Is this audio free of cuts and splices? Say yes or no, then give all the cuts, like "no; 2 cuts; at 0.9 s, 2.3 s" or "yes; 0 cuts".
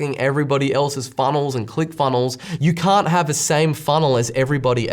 no; 1 cut; at 2.5 s